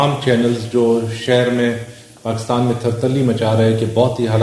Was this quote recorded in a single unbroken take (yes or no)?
yes